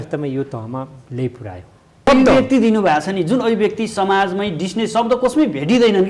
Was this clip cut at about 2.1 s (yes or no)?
yes